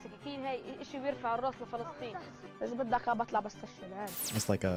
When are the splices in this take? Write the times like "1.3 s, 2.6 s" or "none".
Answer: none